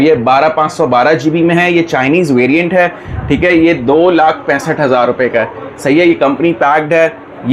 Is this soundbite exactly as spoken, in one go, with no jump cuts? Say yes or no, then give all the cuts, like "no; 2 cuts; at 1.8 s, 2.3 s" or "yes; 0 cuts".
yes; 0 cuts